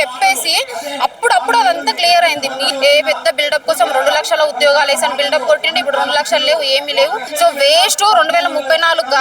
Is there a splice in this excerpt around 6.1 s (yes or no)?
no